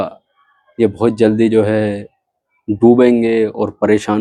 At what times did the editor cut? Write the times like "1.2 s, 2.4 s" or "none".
none